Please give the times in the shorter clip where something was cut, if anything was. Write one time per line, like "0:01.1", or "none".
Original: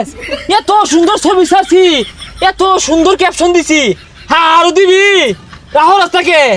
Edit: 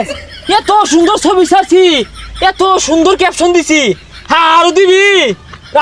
none